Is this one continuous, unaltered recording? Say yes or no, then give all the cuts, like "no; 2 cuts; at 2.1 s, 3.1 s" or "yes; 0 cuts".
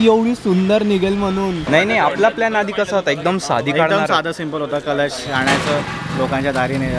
no; 1 cut; at 1.7 s